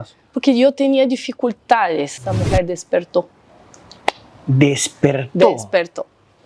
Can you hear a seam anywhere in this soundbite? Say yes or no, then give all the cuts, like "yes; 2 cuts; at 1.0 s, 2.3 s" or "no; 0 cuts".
yes; 1 cut; at 2.2 s